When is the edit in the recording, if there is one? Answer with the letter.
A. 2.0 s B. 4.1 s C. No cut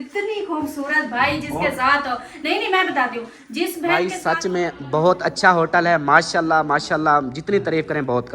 B